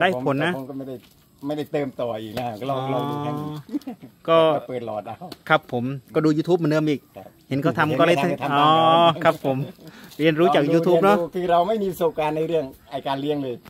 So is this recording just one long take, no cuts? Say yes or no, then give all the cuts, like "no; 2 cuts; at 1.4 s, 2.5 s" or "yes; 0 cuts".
yes; 0 cuts